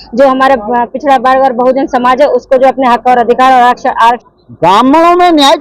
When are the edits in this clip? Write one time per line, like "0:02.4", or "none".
0:04.2